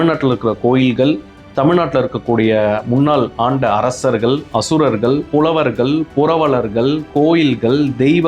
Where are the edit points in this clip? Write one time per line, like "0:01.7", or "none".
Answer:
0:05.2